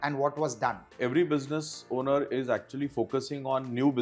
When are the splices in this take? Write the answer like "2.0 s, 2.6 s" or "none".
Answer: 1.0 s